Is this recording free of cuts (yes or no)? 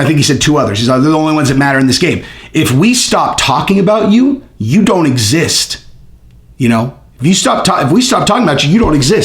yes